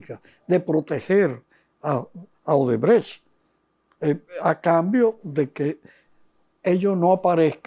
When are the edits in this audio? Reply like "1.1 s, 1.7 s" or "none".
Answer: none

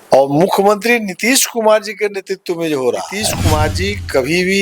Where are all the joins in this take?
3.3 s

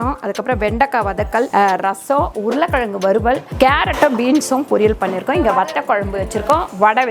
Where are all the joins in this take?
1.5 s, 3.5 s

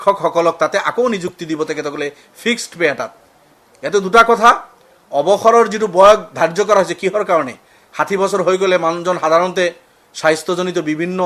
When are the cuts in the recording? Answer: none

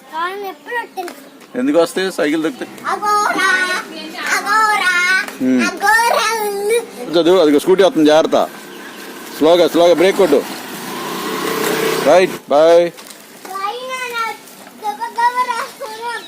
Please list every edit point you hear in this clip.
2.6 s, 7.1 s, 12.4 s

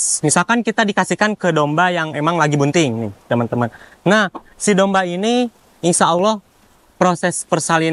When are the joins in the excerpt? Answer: none

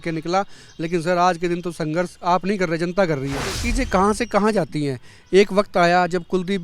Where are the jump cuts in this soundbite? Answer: 3.6 s

